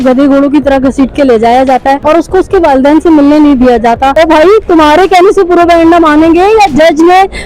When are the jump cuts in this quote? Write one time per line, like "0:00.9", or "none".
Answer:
0:02.0
0:04.1